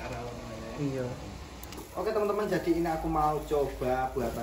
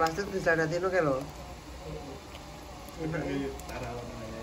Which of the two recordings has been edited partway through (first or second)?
first